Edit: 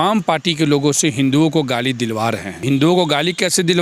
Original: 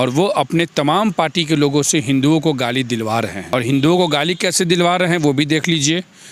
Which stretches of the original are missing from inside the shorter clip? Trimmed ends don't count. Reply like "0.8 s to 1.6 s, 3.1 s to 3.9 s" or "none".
3.5 s to 3.6 s